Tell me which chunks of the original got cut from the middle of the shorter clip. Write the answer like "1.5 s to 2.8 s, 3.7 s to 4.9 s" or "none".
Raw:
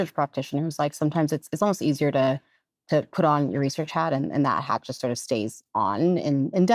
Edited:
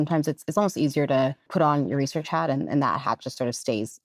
2.5 s to 3.1 s